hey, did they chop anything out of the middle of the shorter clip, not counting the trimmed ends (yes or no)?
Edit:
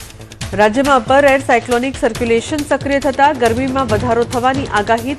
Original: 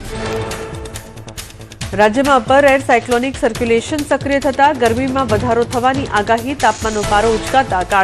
no